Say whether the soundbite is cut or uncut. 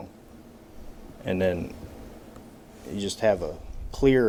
uncut